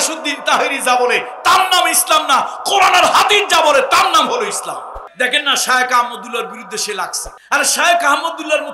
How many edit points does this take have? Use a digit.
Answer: 2